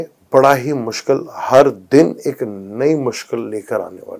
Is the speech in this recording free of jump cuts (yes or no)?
yes